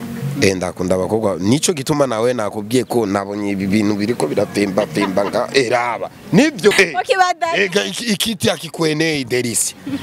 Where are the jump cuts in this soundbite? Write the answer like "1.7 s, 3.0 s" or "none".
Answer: 6.7 s